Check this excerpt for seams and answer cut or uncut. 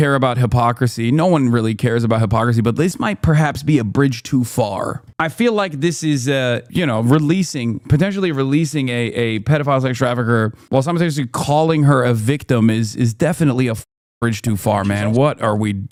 uncut